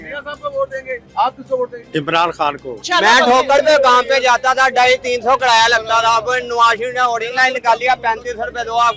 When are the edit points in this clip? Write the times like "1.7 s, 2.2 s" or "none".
1.0 s, 2.7 s